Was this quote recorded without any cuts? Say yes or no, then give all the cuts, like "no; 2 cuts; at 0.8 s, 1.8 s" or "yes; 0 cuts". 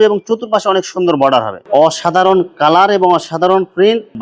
no; 1 cut; at 1.6 s